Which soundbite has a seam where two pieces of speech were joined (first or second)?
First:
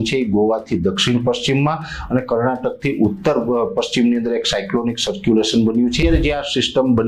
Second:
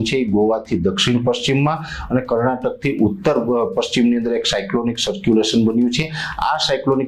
first